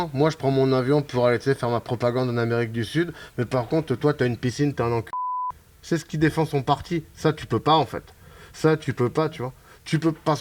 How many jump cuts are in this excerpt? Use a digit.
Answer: 0